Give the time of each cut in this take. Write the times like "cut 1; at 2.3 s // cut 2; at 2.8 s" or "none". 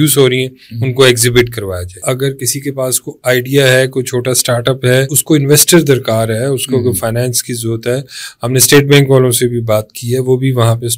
cut 1; at 2.1 s // cut 2; at 5.1 s